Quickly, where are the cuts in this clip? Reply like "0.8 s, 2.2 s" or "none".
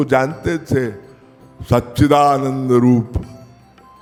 none